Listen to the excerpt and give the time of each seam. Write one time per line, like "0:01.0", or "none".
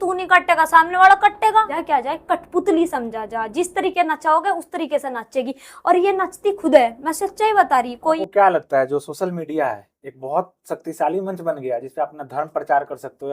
0:01.8
0:08.2